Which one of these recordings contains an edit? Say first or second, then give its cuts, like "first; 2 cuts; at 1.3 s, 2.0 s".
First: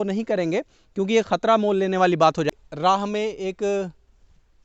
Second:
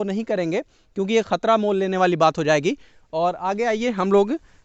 first; 1 cut; at 2.5 s